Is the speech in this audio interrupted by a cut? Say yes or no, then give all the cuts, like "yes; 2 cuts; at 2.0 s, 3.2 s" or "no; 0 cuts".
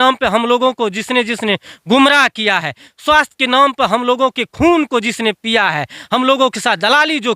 no; 0 cuts